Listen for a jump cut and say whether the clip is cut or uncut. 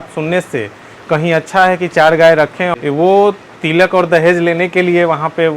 cut